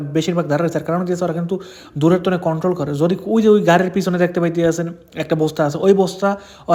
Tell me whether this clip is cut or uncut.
uncut